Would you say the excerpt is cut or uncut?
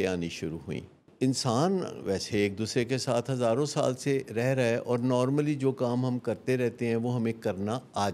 cut